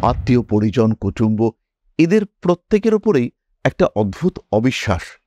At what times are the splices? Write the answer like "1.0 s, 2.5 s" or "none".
none